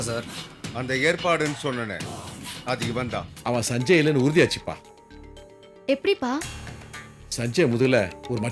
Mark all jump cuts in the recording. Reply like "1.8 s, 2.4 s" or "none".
3.3 s